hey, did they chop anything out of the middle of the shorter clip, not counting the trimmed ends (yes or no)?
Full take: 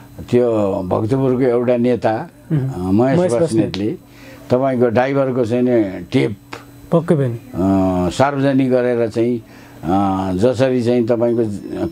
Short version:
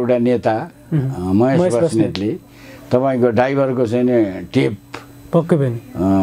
no